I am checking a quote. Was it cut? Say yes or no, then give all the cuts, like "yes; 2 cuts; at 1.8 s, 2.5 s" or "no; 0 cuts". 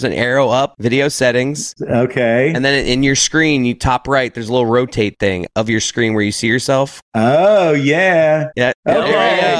yes; 1 cut; at 7.0 s